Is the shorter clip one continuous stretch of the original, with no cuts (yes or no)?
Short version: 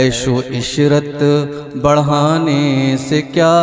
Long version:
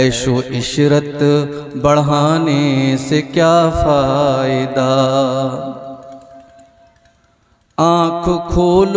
yes